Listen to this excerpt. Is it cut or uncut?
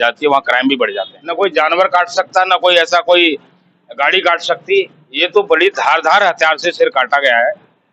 cut